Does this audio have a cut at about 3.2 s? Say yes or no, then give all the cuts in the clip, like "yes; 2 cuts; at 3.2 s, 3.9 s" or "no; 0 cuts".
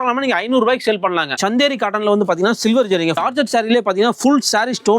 yes; 2 cuts; at 1.4 s, 3.2 s